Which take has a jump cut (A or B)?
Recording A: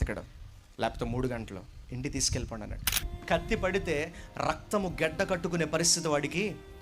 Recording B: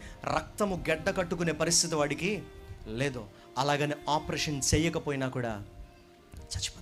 A